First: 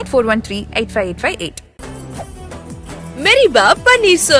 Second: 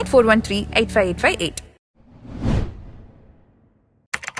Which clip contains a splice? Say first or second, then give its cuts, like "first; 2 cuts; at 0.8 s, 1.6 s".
first; 1 cut; at 1.7 s